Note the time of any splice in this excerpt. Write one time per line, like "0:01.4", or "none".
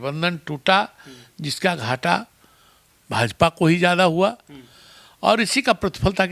none

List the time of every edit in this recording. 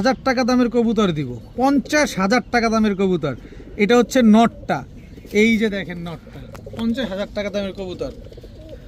none

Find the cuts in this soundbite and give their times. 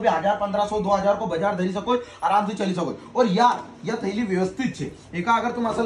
none

